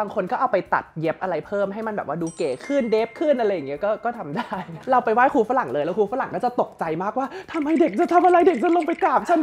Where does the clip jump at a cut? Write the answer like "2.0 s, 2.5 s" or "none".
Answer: 4.8 s